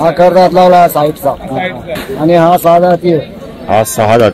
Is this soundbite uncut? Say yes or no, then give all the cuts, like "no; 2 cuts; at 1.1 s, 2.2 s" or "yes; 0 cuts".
no; 1 cut; at 2.0 s